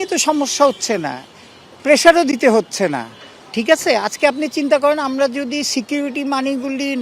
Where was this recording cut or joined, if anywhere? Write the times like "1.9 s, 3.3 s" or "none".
none